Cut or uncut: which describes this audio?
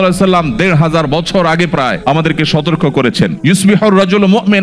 uncut